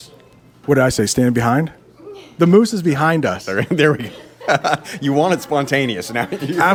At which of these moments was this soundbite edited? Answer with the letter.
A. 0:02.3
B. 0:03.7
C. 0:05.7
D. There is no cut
D